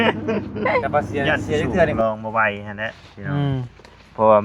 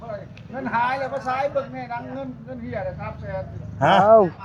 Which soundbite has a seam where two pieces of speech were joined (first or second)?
first